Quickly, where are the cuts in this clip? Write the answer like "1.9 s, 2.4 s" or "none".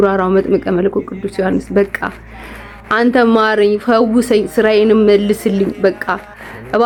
none